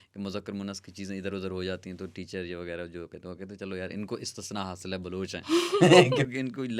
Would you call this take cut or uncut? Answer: uncut